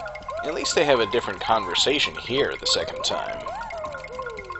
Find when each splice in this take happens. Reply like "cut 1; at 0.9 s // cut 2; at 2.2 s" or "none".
cut 1; at 3.4 s